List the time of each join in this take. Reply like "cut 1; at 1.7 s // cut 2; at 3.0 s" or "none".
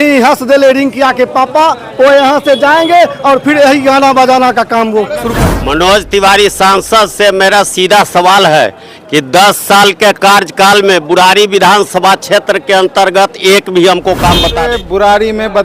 cut 1; at 5.4 s // cut 2; at 14.6 s